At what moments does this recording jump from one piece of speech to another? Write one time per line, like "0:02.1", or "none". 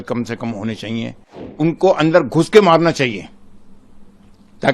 0:01.5